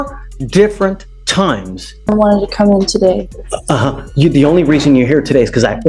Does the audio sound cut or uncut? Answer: cut